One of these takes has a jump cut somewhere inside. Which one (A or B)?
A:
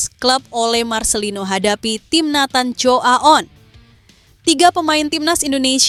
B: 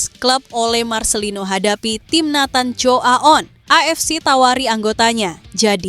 B